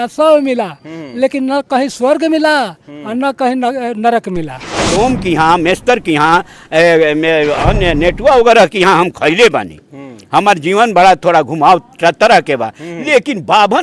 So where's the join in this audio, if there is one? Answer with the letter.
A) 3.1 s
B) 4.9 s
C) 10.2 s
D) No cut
B